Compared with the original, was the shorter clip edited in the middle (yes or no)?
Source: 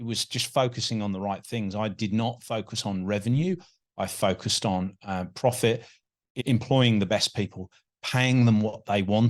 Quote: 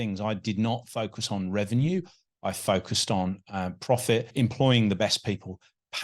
yes